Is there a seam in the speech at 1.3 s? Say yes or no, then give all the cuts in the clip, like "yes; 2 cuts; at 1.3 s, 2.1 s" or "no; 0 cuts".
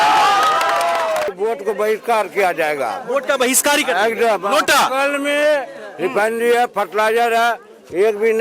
yes; 1 cut; at 1.3 s